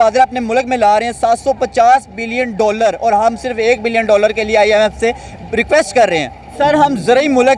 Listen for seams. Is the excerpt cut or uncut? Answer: cut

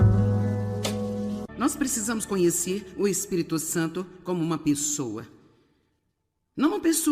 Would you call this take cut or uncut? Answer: cut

